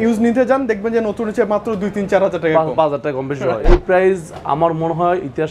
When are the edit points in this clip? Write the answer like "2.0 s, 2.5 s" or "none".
3.6 s